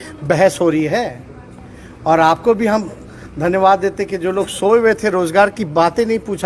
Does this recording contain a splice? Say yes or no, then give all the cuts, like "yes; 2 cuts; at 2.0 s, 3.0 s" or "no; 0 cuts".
no; 0 cuts